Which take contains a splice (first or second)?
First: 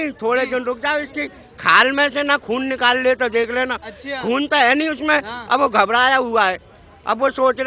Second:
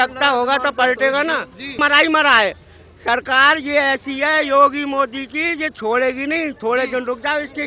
second